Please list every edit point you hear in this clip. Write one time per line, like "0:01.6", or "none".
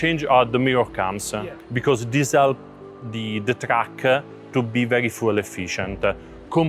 0:01.3

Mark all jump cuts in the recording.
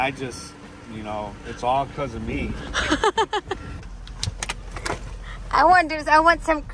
0:03.7

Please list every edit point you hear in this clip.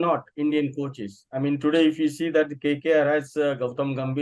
none

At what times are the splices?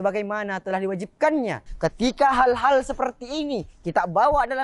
0:01.7

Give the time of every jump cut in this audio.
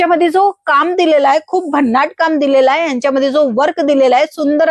none

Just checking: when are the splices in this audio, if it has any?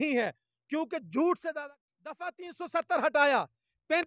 0:01.7

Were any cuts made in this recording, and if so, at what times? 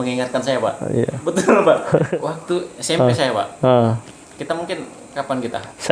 0:02.1

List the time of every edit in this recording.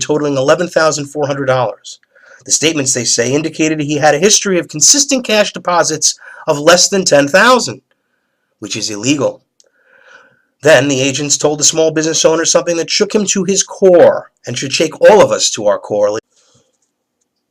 none

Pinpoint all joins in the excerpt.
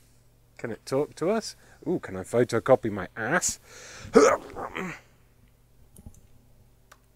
none

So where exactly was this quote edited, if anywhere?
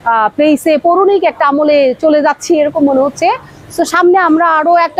none

